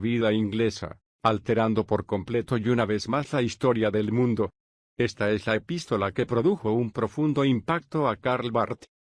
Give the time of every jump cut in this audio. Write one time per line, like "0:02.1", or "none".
none